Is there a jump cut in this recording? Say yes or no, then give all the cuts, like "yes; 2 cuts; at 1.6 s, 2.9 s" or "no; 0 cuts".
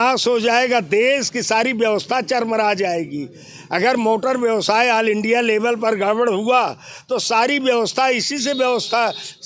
no; 0 cuts